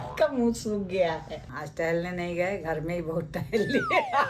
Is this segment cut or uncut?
cut